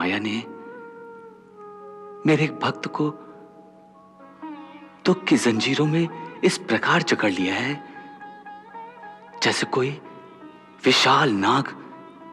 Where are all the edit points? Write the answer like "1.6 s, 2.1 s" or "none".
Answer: none